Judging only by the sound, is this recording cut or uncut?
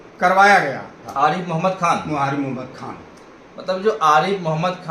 cut